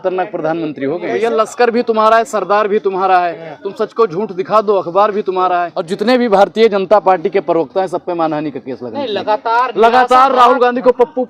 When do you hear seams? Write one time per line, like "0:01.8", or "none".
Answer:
0:01.1
0:05.8